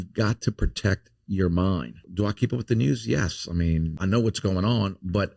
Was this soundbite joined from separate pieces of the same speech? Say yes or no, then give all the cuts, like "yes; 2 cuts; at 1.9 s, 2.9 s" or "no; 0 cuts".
yes; 2 cuts; at 2.0 s, 3.9 s